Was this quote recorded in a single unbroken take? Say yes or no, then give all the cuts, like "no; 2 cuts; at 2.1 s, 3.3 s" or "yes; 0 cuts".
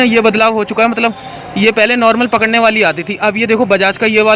yes; 0 cuts